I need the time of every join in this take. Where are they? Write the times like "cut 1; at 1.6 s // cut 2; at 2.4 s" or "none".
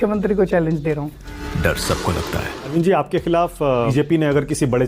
cut 1; at 2.7 s // cut 2; at 3.9 s